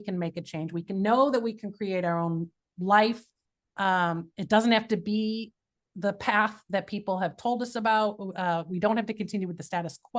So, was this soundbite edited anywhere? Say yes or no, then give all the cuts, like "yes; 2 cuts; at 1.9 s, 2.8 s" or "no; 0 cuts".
no; 0 cuts